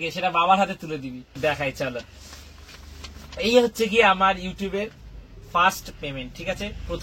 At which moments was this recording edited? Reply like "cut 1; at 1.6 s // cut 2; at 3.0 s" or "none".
cut 1; at 1.4 s